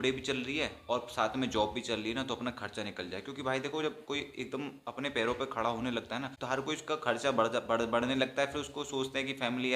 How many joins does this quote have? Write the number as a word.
one